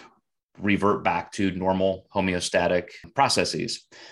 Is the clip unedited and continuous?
no; 1 cut; at 3.1 s

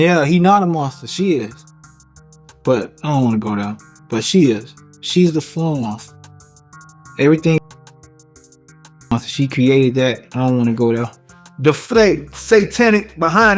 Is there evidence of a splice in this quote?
yes; 2 cuts; at 7.6 s, 9.1 s

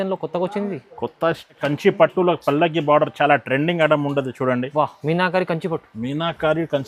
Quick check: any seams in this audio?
yes; 1 cut; at 1.6 s

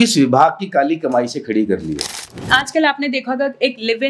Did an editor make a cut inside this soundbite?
yes; 1 cut; at 2.5 s

